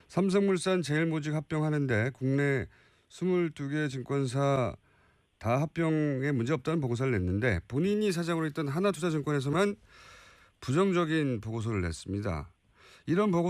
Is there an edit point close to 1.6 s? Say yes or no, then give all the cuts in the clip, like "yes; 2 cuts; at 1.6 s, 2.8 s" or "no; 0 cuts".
yes; 1 cut; at 1.6 s